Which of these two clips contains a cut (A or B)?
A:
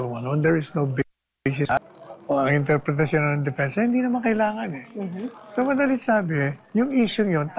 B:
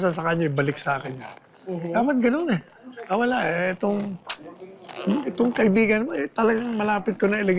A